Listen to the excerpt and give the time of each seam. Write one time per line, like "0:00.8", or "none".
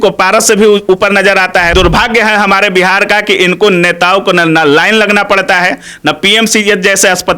0:01.7